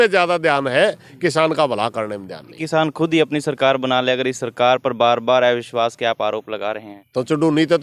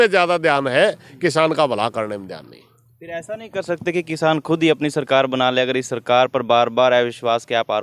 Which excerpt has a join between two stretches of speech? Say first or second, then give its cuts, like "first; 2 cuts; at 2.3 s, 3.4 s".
first; 2 cuts; at 2.6 s, 6.9 s